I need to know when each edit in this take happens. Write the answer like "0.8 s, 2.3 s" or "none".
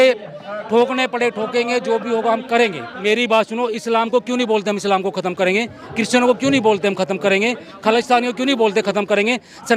2.9 s